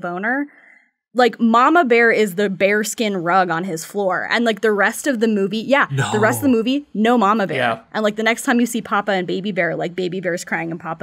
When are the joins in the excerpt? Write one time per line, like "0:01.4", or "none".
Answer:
none